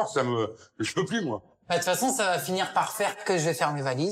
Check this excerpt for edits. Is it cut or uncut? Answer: cut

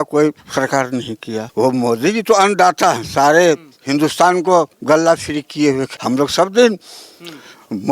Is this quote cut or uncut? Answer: cut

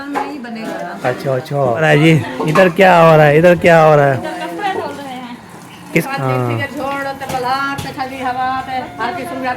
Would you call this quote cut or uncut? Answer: cut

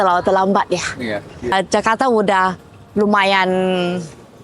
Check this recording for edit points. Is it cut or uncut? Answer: cut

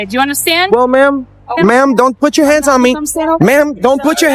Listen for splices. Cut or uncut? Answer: cut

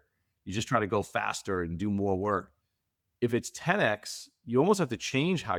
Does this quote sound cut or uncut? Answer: uncut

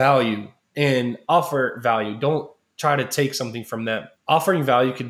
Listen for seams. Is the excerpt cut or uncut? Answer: cut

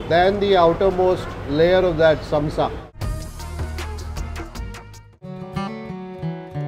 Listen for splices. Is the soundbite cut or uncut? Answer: cut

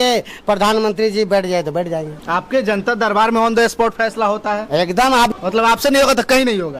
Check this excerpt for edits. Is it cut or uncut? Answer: cut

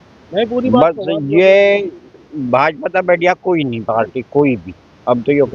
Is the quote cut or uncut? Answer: uncut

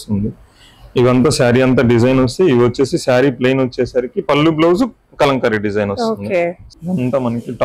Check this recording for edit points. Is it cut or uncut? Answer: cut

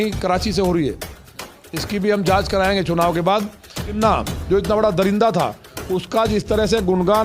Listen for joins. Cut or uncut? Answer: cut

